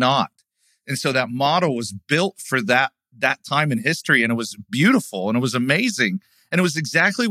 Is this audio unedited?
yes; 0 cuts

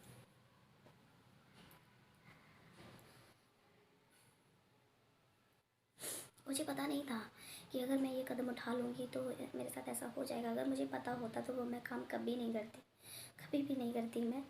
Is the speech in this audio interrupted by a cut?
yes; 1 cut; at 6.4 s

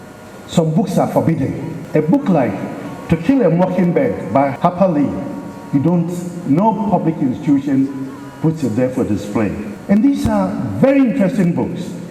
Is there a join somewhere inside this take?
yes; 3 cuts; at 1.7 s, 4.5 s, 9.7 s

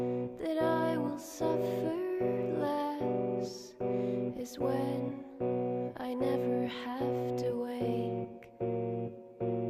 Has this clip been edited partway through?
yes; 1 cut; at 8.5 s

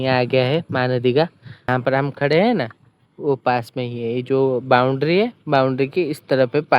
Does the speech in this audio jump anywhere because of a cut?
yes; 1 cut; at 1.6 s

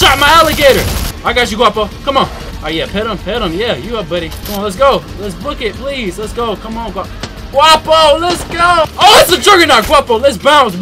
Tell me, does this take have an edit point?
yes; 4 cuts; at 1.0 s, 2.5 s, 4.4 s, 8.9 s

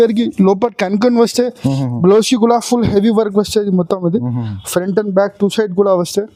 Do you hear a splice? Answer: no; 0 cuts

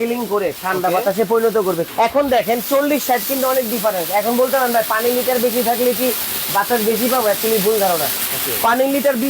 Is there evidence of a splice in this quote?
yes; 1 cut; at 1.9 s

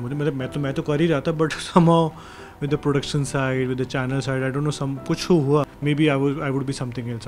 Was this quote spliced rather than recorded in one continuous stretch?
yes; 1 cut; at 5.7 s

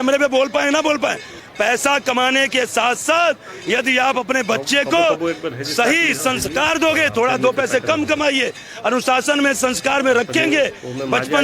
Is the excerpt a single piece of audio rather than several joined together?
no; 1 cut; at 1.4 s

